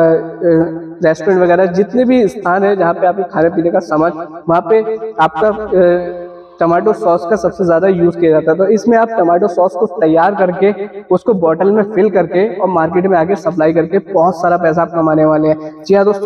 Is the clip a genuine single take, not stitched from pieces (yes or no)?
yes